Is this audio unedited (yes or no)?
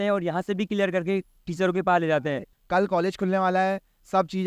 no